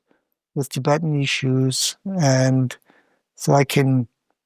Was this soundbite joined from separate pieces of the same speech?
no; 0 cuts

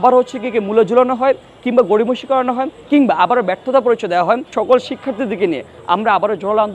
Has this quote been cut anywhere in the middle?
yes; 1 cut; at 4.5 s

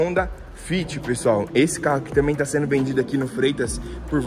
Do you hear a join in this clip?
no; 0 cuts

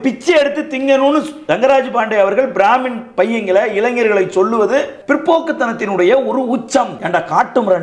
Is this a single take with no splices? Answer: no; 2 cuts; at 4.9 s, 7.0 s

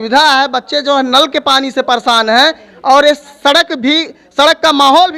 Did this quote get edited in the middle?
no; 0 cuts

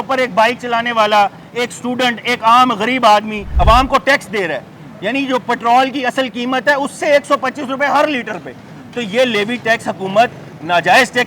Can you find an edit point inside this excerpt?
no; 0 cuts

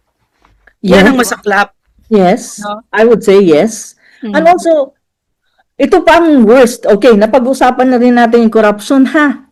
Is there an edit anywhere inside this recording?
no; 0 cuts

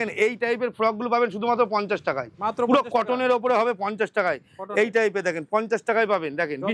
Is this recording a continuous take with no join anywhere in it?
yes; 0 cuts

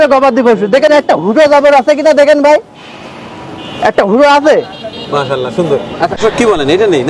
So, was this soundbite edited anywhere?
yes; 1 cut; at 6.2 s

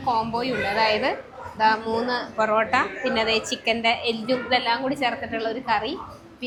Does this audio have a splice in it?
no; 0 cuts

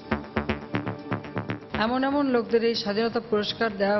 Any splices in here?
yes; 1 cut; at 1.7 s

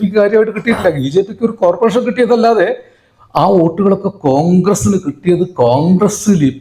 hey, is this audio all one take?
yes; 0 cuts

